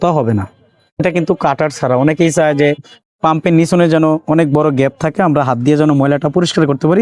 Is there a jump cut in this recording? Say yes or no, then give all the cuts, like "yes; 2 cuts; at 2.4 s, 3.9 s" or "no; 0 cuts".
yes; 1 cut; at 1.0 s